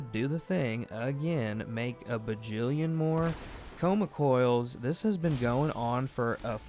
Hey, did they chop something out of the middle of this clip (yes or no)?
no